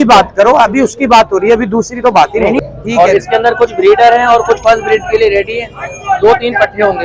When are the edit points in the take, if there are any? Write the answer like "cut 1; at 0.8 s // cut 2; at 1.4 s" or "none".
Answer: cut 1; at 2.6 s